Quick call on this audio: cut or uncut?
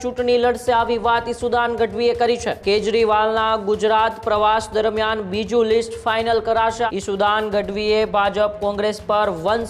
cut